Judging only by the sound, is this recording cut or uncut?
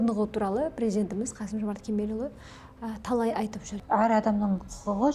cut